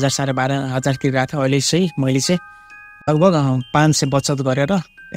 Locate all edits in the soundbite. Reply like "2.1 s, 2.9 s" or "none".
3.1 s